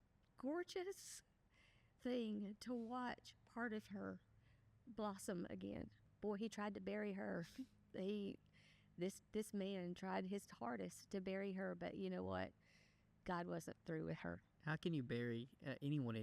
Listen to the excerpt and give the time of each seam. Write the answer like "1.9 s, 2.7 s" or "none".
6.1 s, 14.5 s